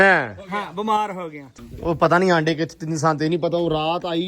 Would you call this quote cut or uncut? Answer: cut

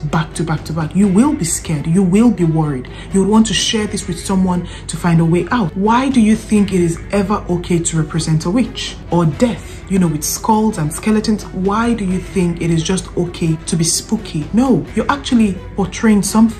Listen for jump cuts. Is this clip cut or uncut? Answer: cut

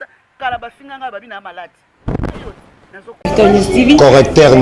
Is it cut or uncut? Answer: cut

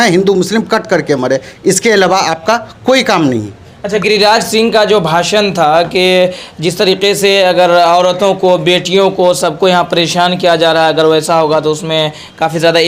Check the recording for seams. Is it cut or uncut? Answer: uncut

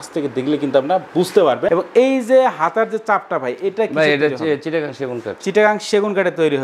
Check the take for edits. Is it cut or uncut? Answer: uncut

